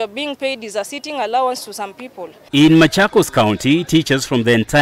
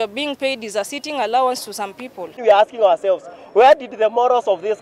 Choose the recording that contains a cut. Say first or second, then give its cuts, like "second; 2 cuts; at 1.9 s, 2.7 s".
second; 1 cut; at 2.4 s